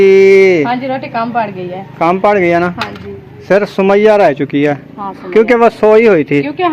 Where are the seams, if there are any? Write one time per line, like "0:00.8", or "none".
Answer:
none